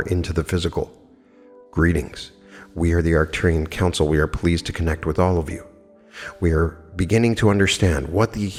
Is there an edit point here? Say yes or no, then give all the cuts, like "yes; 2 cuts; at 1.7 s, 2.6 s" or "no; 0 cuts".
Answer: no; 0 cuts